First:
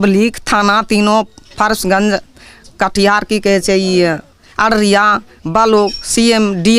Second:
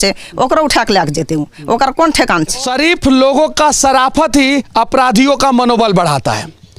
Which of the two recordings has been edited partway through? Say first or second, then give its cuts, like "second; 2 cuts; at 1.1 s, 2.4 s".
second; 1 cut; at 2.7 s